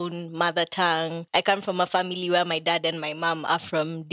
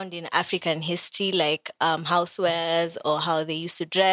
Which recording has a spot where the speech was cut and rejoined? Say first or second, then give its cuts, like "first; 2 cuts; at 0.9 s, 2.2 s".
first; 1 cut; at 1.2 s